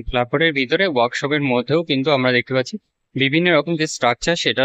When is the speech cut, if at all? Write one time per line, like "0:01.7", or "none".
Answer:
none